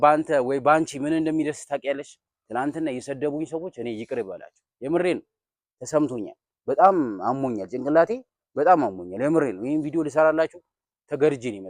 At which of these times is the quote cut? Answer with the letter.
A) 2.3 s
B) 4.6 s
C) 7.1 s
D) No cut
A